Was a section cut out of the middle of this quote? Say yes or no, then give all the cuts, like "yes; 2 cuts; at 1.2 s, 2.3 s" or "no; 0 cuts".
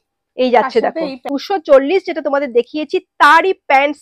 yes; 1 cut; at 1.3 s